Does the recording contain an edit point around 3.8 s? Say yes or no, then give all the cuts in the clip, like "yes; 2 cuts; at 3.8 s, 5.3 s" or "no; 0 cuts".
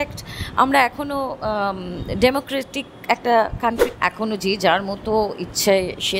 yes; 1 cut; at 3.8 s